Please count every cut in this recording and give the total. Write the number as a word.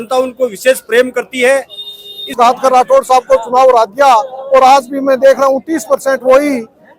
one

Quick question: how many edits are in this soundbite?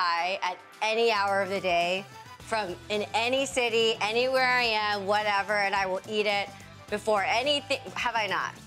zero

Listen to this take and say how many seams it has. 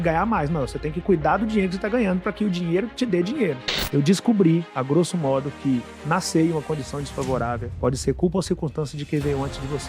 one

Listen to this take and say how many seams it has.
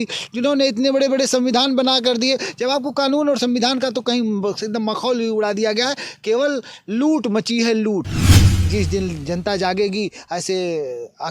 one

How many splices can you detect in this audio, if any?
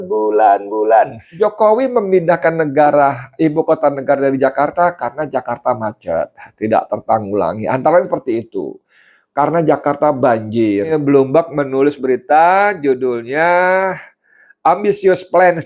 two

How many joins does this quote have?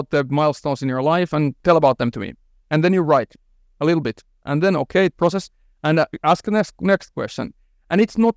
one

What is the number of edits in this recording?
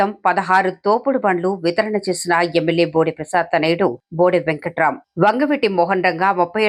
zero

